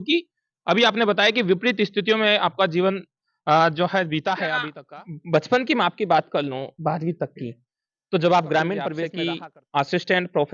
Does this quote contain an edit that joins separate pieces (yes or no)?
yes